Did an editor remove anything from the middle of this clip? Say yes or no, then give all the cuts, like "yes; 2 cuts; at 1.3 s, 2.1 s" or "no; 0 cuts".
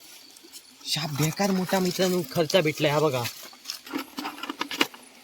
yes; 1 cut; at 3.8 s